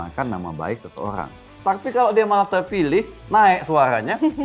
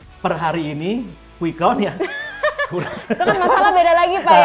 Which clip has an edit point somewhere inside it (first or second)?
first